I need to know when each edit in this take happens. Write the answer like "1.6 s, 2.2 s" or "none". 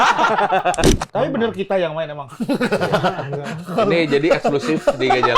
1.0 s